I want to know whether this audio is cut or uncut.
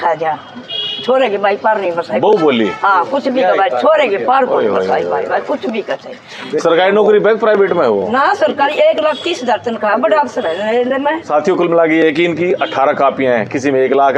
cut